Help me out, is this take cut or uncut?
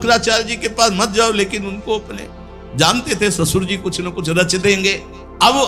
uncut